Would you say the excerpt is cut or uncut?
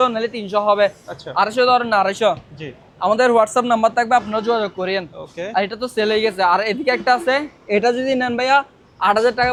uncut